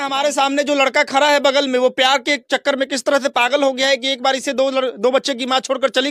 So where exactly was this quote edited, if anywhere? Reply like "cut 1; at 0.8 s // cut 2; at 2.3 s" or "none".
none